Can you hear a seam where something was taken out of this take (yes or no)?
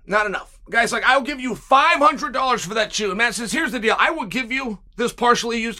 yes